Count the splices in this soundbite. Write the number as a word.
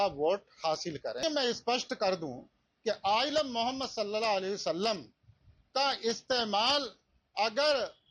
one